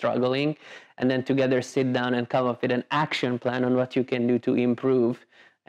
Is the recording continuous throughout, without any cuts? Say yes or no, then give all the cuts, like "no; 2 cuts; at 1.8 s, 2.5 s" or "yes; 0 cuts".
yes; 0 cuts